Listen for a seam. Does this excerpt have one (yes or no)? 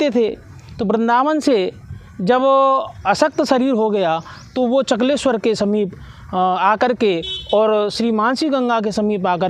no